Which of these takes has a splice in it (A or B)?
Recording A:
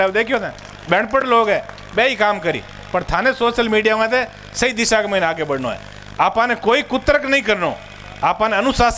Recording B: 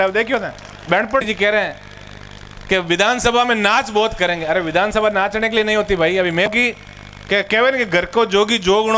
B